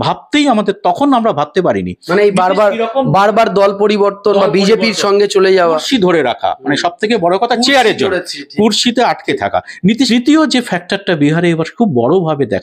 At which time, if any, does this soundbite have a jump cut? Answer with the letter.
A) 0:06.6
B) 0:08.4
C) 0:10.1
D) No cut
C